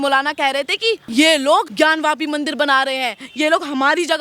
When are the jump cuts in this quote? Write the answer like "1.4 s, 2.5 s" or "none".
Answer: 1.0 s, 1.7 s